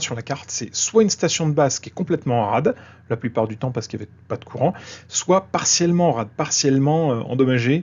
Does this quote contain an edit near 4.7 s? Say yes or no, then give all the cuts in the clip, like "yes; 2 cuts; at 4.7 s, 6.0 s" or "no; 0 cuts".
no; 0 cuts